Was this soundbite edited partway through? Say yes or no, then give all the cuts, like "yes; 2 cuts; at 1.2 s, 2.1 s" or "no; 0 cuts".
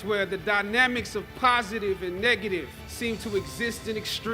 no; 0 cuts